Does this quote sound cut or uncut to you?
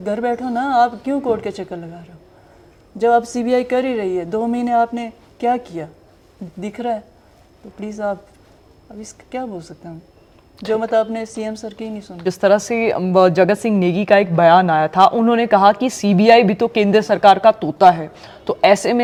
uncut